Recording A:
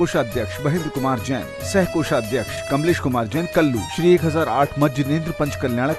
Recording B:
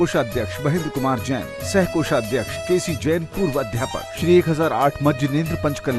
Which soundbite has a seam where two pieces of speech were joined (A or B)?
B